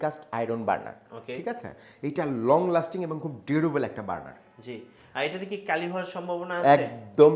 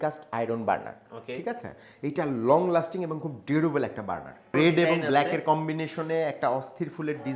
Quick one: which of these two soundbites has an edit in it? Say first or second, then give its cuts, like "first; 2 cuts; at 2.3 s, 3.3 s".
second; 1 cut; at 4.5 s